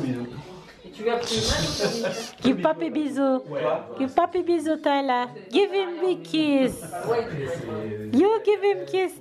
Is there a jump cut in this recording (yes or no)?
no